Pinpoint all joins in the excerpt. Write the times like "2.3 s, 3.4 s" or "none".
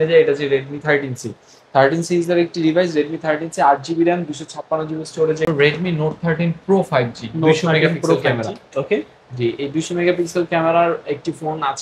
5.5 s